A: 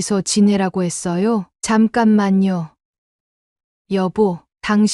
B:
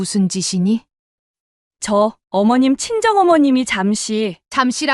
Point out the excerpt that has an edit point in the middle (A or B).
A